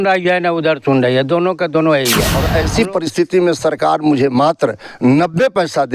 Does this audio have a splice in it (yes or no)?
yes